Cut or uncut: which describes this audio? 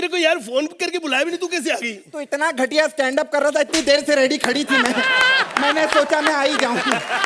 uncut